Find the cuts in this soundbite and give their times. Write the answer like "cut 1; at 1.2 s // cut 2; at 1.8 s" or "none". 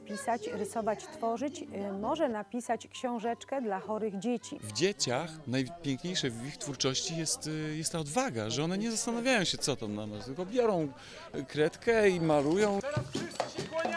cut 1; at 4.6 s // cut 2; at 12.8 s